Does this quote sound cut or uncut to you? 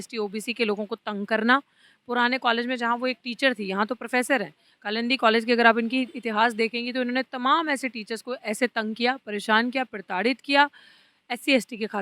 uncut